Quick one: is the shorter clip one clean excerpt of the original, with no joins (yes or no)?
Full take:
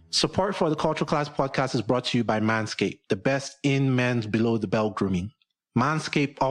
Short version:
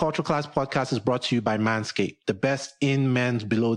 yes